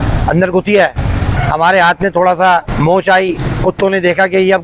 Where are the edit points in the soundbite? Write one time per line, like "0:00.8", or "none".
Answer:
0:01.3